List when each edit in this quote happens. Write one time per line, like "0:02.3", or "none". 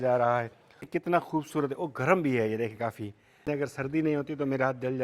0:00.9
0:03.5